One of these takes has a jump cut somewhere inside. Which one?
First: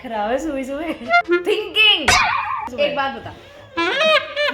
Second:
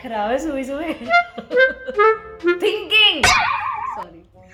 first; 2 cuts; at 1.3 s, 2.7 s

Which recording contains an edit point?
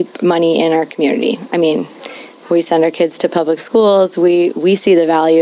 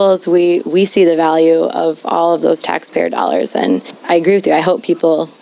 second; 1 cut; at 3.9 s

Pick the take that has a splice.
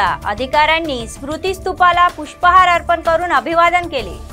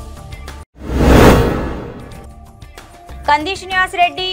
second; 1 cut; at 3.2 s

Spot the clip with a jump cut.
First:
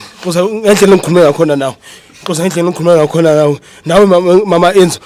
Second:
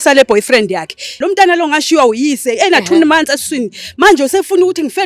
second; 1 cut; at 1.1 s

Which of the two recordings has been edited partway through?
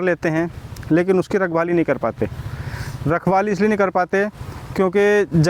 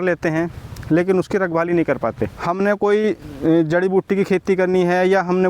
second; 1 cut; at 2.3 s

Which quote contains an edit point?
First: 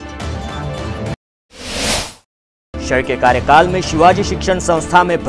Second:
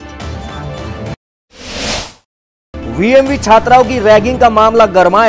second; 1 cut; at 2.8 s

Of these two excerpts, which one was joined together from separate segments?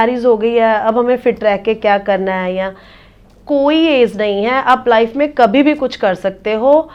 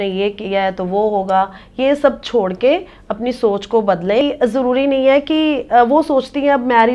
second; 1 cut; at 4.2 s

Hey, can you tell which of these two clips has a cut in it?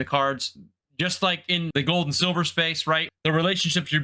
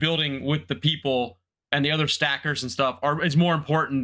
first; 2 cuts; at 1.7 s, 3.1 s

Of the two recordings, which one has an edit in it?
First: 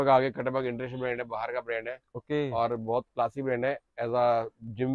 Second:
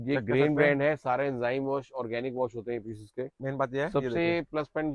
second; 1 cut; at 3.4 s

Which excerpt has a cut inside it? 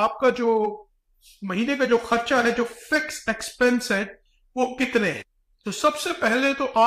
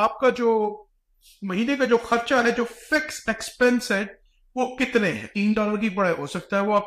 second; 1 cut; at 5.3 s

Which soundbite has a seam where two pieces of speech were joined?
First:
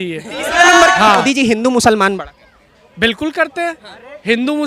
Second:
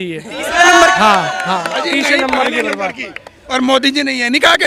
first; 1 cut; at 1.2 s

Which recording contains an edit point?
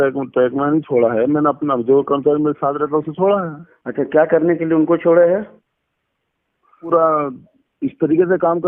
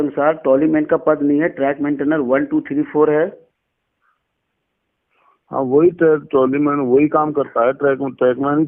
first; 1 cut; at 6.9 s

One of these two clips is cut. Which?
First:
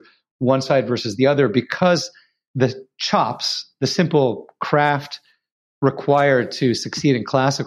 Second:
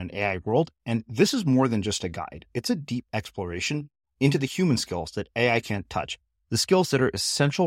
first; 1 cut; at 2.5 s

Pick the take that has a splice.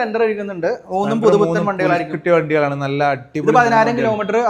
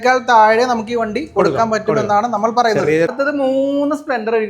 second; 1 cut; at 3.1 s

